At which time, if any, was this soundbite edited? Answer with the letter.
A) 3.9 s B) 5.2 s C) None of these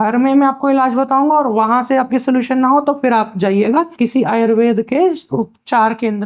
A